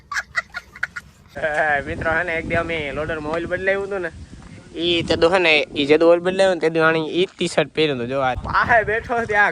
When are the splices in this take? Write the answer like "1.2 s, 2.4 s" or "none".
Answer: 1.1 s, 8.4 s